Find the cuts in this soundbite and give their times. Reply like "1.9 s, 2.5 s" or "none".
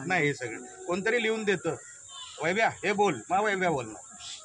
none